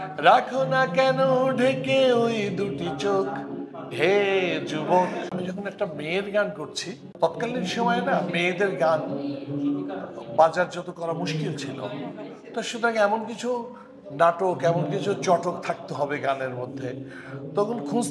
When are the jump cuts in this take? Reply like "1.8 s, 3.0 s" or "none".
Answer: 5.3 s, 7.1 s